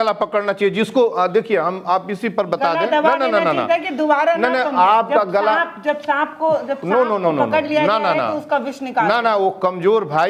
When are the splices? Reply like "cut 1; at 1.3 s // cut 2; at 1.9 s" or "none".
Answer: none